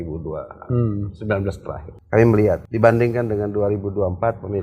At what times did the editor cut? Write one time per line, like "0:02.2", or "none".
0:01.9
0:02.7